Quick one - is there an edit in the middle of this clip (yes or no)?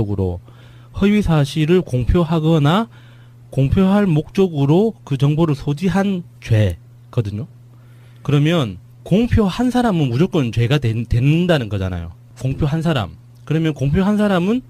yes